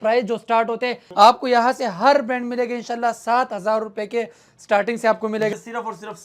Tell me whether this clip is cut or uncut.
cut